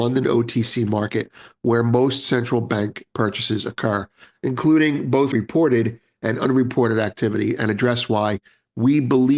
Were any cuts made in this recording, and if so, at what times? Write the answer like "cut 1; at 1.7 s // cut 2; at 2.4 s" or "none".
cut 1; at 5.3 s